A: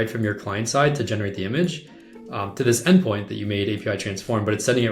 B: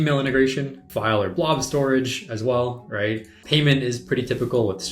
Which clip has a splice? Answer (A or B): B